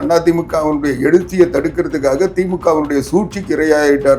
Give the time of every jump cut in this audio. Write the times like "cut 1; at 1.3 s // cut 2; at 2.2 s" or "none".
none